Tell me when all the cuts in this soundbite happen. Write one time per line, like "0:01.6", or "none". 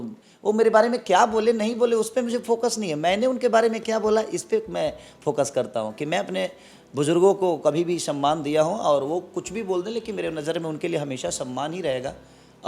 none